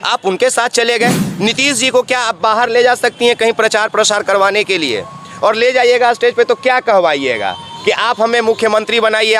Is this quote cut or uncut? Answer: cut